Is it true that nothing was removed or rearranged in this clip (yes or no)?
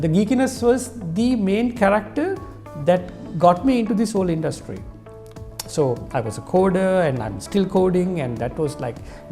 yes